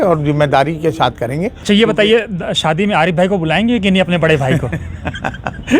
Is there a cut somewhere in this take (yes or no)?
yes